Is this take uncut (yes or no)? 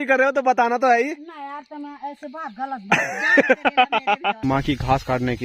no